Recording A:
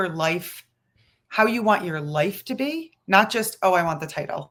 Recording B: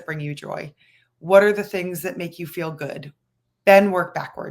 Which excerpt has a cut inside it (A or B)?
B